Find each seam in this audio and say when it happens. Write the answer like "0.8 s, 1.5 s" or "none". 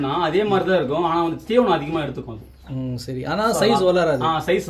none